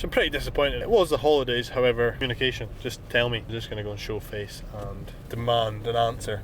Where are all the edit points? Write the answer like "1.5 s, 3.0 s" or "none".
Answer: 0.8 s, 2.2 s, 3.5 s